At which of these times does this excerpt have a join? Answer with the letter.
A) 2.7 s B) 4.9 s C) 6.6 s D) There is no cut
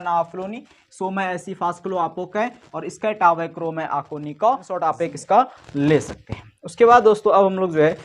B